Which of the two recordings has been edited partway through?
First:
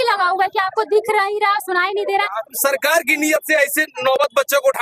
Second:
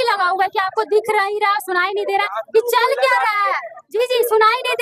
first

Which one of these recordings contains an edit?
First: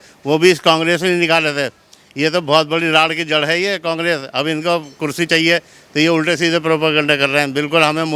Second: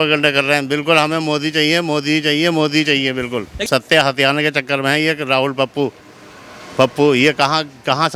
second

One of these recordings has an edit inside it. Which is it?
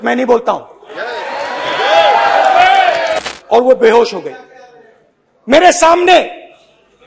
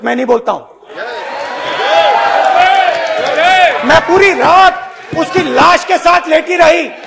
first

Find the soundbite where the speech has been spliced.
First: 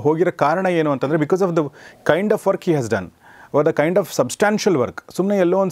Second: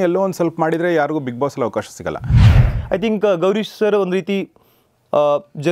second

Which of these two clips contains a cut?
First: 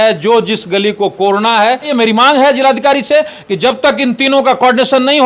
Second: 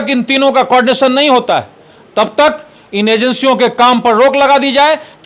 first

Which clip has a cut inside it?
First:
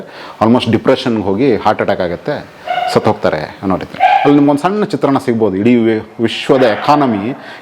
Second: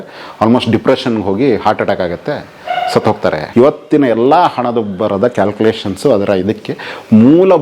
second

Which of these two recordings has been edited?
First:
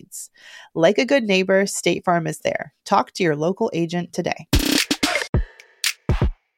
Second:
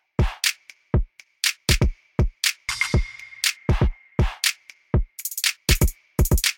first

